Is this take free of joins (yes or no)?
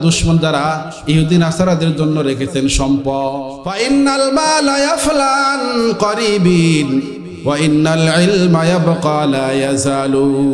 no